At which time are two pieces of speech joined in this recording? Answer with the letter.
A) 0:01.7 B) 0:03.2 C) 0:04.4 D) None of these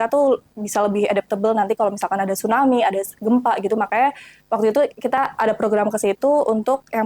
D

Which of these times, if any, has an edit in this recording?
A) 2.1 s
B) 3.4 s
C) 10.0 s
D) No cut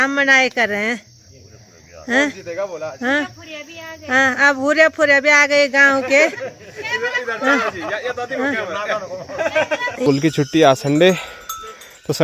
C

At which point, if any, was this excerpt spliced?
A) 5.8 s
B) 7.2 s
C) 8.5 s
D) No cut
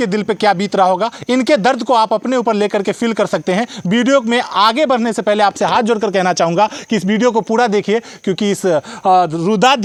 D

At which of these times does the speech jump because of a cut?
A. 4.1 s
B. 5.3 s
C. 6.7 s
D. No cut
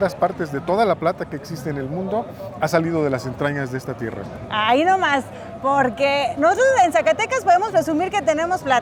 D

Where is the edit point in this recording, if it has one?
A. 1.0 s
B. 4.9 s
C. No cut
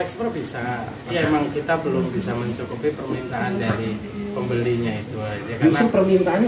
A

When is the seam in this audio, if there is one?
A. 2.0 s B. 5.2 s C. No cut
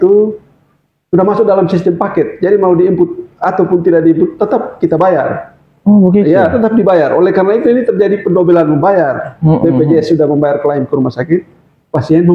C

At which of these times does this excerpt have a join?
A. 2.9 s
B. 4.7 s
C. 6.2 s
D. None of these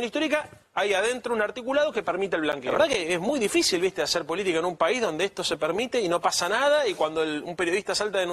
A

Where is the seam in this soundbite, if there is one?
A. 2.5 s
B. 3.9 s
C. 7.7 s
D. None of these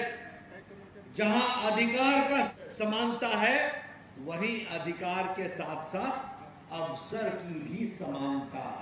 A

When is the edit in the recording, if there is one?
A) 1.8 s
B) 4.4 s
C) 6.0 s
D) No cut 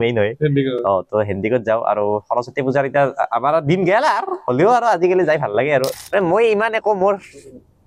C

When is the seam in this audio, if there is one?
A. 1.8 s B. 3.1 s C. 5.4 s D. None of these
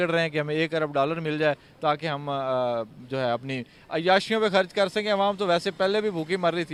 D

